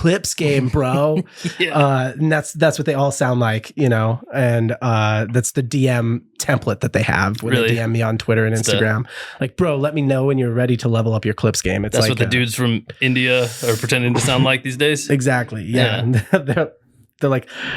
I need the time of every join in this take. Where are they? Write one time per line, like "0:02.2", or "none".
none

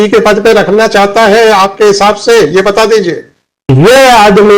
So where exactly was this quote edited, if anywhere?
0:03.7

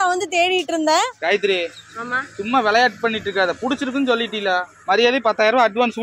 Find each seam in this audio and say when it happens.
0:01.2

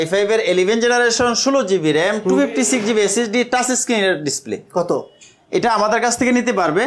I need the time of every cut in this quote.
none

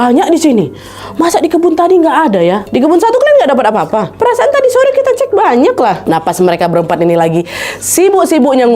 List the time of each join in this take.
0:02.6
0:06.0

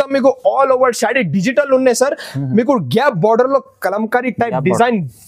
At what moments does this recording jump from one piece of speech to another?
none

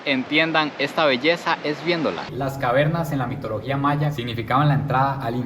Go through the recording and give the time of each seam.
0:02.2
0:04.2

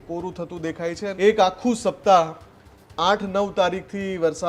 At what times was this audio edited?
0:01.1

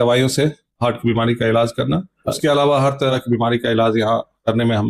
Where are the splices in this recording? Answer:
0:02.4
0:03.1

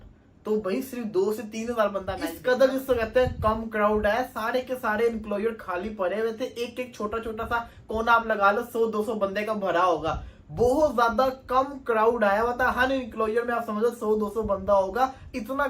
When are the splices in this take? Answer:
0:02.2

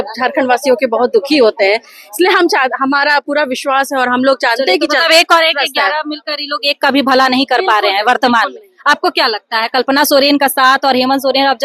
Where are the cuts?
none

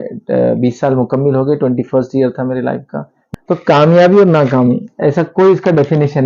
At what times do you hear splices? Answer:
0:03.1

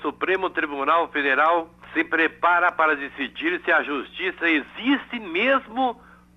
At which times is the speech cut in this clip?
0:01.8

